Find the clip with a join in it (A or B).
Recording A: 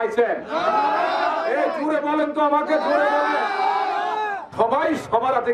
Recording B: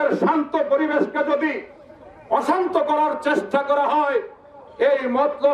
A